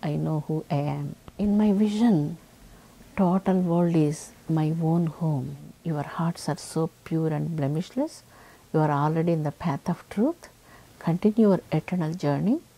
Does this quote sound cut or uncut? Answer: cut